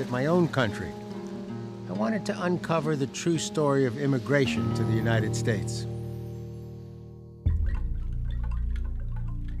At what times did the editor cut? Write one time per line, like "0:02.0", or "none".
none